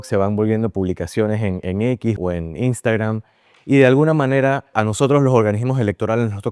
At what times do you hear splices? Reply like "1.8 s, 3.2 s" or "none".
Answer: 2.2 s, 4.7 s

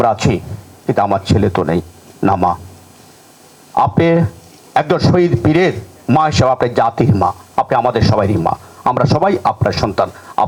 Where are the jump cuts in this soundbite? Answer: none

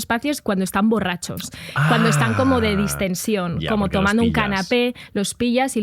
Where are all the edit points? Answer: none

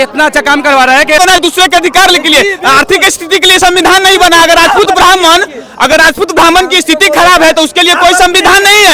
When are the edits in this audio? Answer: 1.2 s

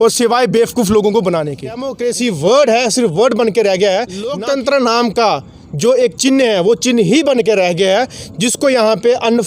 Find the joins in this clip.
1.9 s, 4.3 s

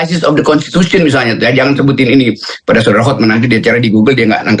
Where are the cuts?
none

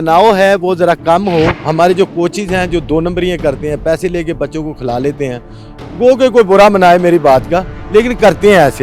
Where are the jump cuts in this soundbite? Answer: 1.6 s

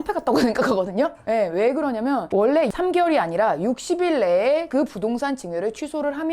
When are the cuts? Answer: 2.3 s

